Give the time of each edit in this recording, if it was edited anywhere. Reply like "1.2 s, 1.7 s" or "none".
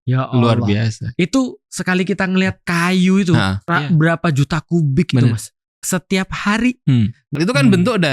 2.6 s, 3.6 s, 5.6 s, 7.2 s